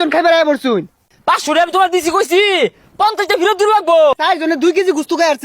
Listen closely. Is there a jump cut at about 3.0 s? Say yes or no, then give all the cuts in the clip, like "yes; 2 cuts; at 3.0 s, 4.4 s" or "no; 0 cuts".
no; 2 cuts; at 1.1 s, 4.2 s